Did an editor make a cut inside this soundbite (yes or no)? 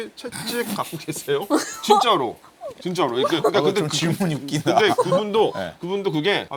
no